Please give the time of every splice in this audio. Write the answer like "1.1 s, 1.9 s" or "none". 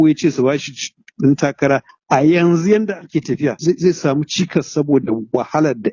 1.9 s, 3.6 s